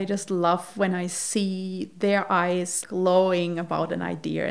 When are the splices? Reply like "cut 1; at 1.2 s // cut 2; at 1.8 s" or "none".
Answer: cut 1; at 2.8 s